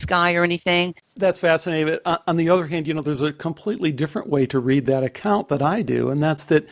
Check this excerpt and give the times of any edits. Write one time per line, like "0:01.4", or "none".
0:01.0